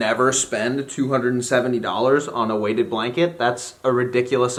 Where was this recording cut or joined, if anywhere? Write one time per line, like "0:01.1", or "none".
none